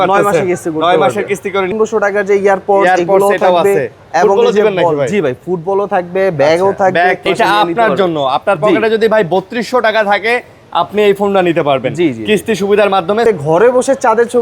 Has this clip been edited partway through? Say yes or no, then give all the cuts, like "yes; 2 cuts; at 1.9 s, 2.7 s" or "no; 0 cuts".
yes; 3 cuts; at 1.7 s, 7.3 s, 13.2 s